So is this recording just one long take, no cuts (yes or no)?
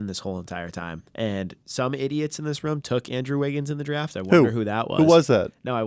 no